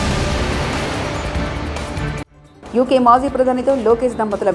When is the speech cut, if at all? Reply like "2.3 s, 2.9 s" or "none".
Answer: none